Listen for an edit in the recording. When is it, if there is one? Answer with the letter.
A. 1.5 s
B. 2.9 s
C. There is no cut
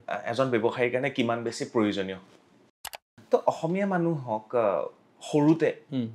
B